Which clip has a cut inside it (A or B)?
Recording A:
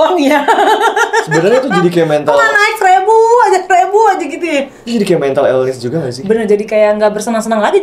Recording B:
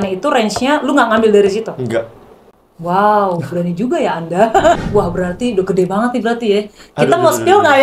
B